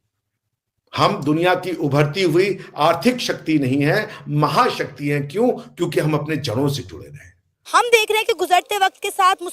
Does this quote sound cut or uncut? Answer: cut